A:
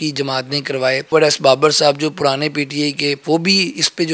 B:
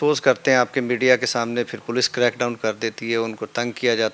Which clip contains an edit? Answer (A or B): A